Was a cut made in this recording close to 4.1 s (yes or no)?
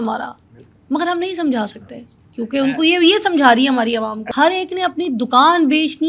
yes